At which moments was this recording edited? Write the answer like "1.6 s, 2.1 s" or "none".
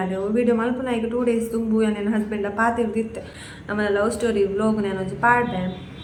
none